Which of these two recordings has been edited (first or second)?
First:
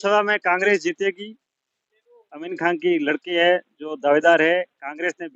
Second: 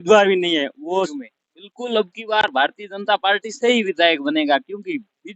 second